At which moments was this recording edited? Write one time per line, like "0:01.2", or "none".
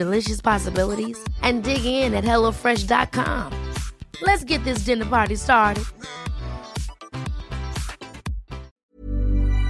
0:08.7